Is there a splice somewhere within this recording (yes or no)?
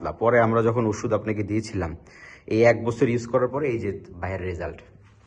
no